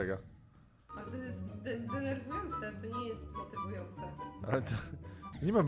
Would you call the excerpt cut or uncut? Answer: uncut